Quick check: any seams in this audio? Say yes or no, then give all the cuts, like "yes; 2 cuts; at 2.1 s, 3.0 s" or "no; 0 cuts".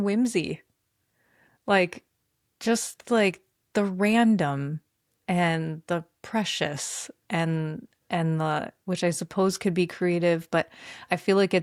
no; 0 cuts